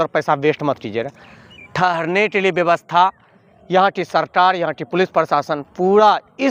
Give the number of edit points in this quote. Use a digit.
0